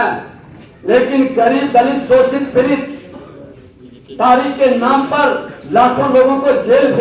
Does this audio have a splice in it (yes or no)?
no